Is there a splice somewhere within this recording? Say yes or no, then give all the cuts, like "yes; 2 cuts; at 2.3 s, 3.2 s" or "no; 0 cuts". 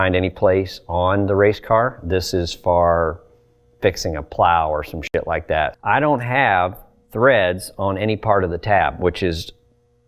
yes; 1 cut; at 5.8 s